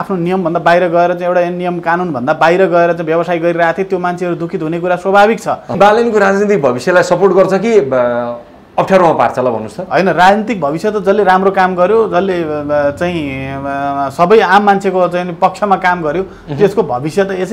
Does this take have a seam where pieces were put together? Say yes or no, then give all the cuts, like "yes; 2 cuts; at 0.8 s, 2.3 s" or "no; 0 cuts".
yes; 1 cut; at 5.8 s